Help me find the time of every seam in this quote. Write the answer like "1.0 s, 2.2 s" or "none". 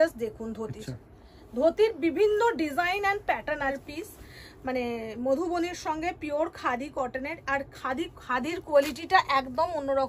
3.8 s